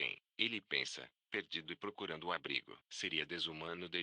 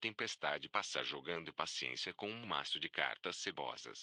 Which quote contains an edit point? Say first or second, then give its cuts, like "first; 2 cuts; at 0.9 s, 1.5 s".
first; 1 cut; at 2.8 s